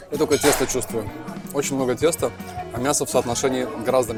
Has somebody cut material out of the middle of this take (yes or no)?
no